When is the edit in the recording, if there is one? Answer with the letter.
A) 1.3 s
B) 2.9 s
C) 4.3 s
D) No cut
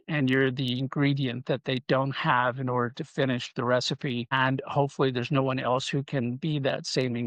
C